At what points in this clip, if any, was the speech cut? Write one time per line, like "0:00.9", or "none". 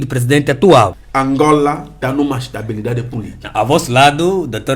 0:01.0
0:02.0